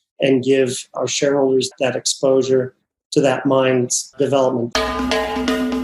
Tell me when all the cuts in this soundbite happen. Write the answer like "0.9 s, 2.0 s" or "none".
4.7 s